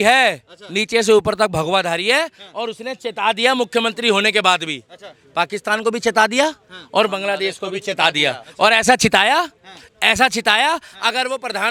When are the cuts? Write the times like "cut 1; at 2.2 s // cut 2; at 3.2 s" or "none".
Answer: none